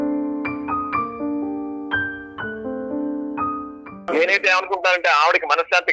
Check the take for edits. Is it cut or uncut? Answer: cut